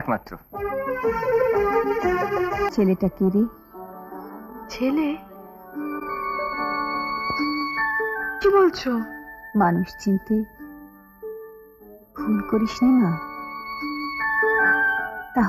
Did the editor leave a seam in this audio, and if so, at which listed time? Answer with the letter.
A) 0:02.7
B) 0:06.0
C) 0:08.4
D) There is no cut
A